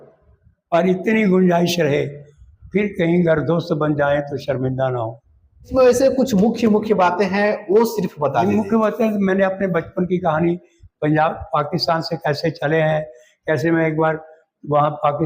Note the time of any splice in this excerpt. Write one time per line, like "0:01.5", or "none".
0:05.7